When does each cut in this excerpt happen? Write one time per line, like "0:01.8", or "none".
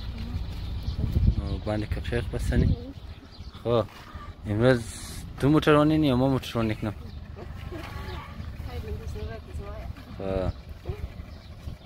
none